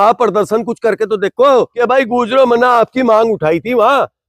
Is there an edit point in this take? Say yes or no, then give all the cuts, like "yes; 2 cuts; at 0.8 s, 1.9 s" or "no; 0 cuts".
yes; 1 cut; at 1.8 s